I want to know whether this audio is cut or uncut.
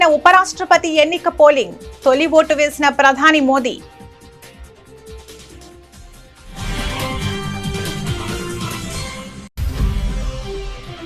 cut